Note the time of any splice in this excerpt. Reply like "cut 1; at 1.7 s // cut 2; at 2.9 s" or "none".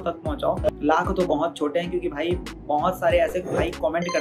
none